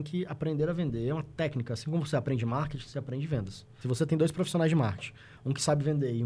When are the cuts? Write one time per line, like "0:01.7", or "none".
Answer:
0:03.7